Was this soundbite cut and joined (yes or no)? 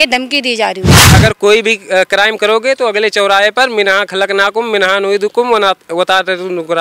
yes